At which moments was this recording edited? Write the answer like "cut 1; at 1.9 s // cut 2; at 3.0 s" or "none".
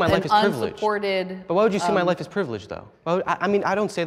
cut 1; at 2.9 s